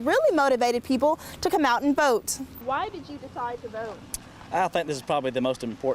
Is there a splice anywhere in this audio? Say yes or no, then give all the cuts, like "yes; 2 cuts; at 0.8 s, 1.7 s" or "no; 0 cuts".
no; 0 cuts